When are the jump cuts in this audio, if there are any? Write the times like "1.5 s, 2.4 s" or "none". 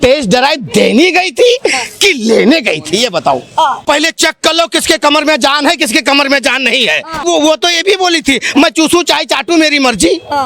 3.8 s, 7.2 s

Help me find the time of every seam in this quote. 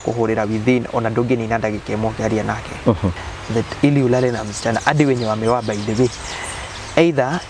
3.3 s

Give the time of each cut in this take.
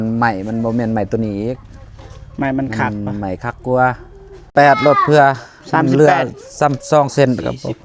4.5 s

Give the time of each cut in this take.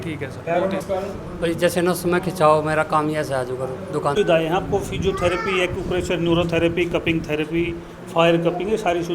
0.8 s, 4.2 s

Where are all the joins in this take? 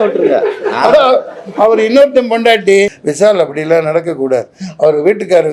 3.0 s

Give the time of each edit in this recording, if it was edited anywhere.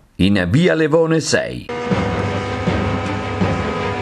1.6 s

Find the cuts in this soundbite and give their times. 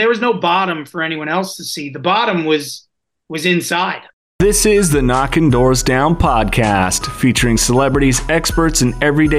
4.1 s

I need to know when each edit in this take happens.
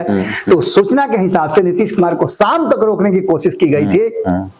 none

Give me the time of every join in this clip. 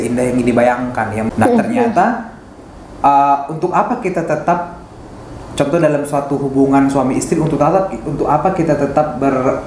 1.3 s

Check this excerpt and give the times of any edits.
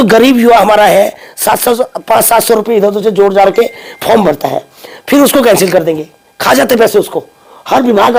none

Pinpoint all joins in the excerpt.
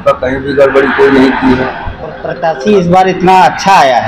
2.3 s

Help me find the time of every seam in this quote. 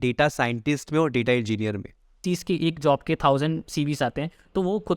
2.2 s

